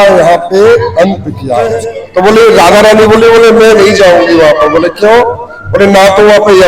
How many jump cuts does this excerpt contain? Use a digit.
1